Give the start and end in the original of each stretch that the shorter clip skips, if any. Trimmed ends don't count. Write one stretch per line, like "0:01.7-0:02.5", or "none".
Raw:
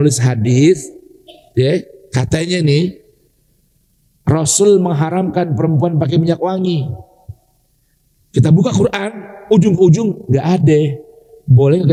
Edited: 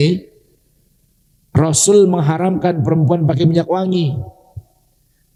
none